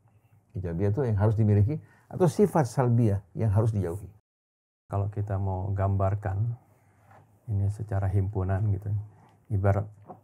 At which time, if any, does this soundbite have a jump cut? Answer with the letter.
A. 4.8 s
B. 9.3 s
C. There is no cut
A